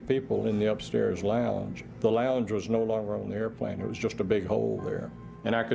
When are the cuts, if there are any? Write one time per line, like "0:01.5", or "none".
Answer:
none